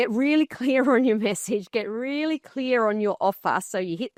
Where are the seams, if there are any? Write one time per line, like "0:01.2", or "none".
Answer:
none